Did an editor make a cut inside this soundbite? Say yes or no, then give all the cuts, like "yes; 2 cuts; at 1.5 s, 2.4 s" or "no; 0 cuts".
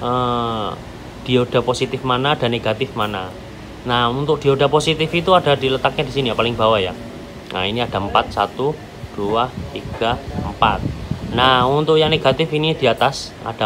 no; 0 cuts